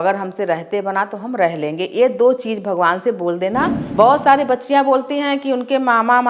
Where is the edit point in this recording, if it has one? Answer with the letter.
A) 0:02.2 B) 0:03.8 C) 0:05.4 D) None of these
B